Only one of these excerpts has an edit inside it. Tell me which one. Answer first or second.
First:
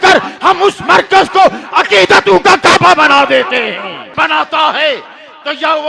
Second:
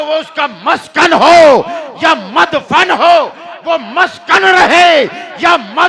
first